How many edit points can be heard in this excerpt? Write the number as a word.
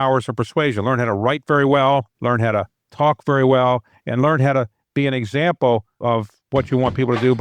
two